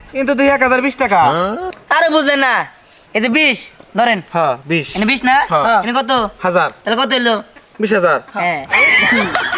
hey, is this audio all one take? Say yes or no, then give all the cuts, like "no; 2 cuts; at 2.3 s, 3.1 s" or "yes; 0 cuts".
yes; 0 cuts